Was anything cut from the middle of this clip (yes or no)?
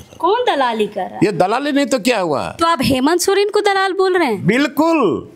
yes